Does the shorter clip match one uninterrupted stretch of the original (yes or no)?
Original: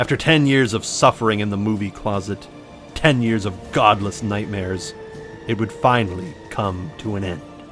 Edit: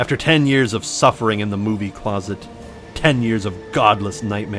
yes